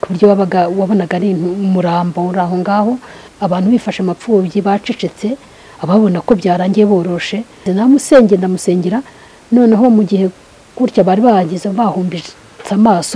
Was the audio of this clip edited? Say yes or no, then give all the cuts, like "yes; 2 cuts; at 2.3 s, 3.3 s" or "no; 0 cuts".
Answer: yes; 2 cuts; at 3.3 s, 7.7 s